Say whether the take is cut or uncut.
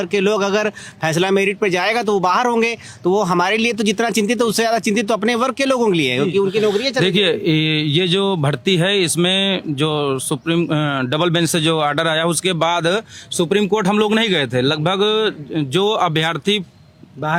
uncut